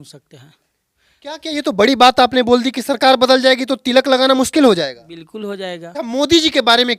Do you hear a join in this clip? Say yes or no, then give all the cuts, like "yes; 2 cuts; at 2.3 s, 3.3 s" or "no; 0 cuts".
yes; 1 cut; at 5.8 s